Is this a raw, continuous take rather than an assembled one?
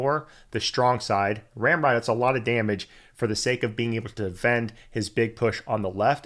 yes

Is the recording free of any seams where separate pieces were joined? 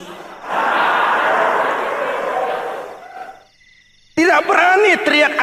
yes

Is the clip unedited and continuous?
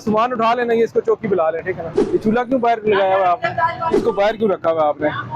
no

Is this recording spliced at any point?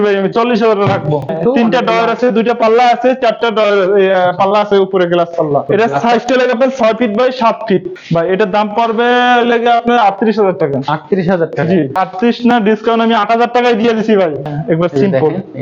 yes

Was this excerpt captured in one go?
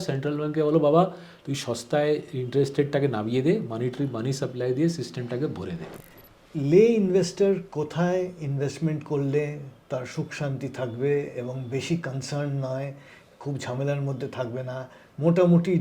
no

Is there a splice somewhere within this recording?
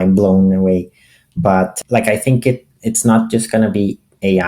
yes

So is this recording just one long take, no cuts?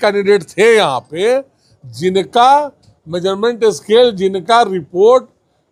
yes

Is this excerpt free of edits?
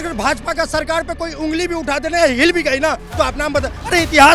yes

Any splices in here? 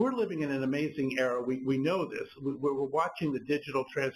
yes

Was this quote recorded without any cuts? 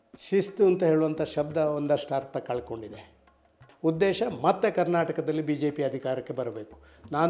no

